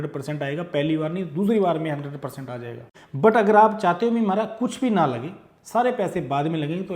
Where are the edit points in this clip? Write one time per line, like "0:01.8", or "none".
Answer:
0:03.0